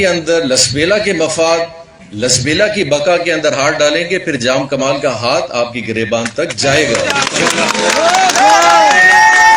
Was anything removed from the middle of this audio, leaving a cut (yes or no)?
no